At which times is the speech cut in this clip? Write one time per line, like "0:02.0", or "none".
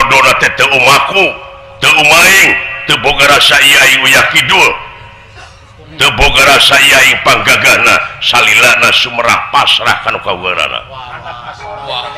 none